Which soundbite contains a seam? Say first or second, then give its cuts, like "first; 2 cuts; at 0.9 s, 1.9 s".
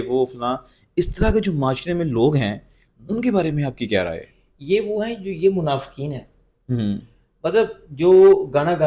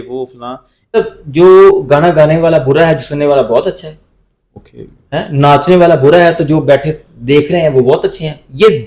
second; 1 cut; at 1.0 s